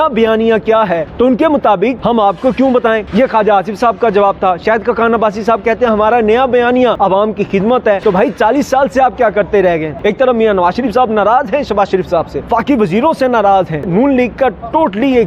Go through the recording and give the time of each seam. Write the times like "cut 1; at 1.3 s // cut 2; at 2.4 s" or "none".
cut 1; at 1.1 s // cut 2; at 2.0 s // cut 3; at 3.1 s // cut 4; at 7.0 s // cut 5; at 8.0 s // cut 6; at 9.9 s // cut 7; at 12.4 s // cut 8; at 13.8 s